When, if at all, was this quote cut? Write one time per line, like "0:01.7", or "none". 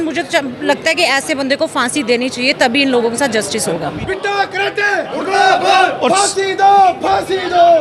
0:04.0